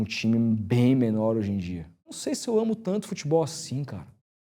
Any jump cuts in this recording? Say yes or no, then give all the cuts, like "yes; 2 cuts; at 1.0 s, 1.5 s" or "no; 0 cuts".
yes; 1 cut; at 2.1 s